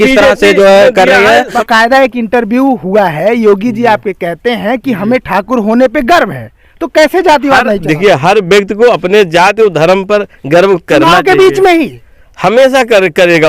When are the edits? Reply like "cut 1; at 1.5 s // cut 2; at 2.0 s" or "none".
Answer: cut 1; at 1.6 s